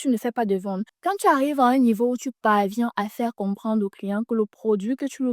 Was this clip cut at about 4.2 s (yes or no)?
no